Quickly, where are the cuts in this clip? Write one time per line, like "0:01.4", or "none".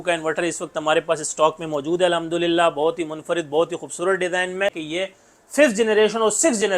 0:04.7